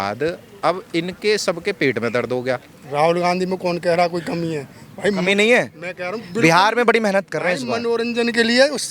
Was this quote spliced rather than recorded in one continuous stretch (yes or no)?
yes